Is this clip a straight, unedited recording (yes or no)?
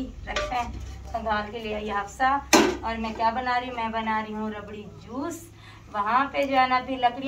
yes